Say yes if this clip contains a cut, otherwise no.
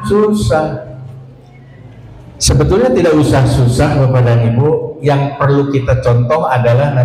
no